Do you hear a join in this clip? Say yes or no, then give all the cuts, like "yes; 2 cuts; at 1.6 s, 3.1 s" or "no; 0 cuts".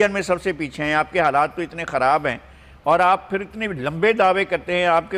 no; 0 cuts